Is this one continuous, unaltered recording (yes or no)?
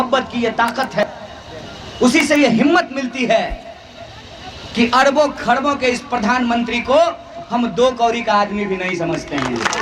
no